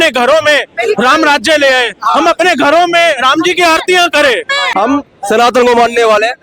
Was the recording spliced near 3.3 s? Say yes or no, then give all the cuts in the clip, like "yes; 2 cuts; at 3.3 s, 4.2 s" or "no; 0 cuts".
no; 1 cut; at 4.6 s